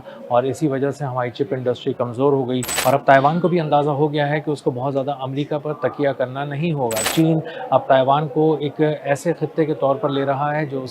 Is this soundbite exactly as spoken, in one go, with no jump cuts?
no; 2 cuts; at 2.8 s, 7.1 s

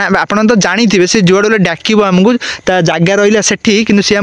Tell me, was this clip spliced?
no; 0 cuts

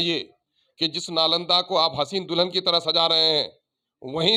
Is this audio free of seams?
yes; 0 cuts

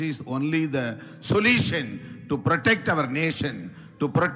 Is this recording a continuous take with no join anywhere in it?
yes; 0 cuts

